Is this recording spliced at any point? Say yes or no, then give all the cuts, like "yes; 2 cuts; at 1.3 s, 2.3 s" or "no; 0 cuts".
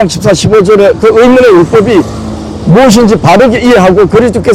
no; 0 cuts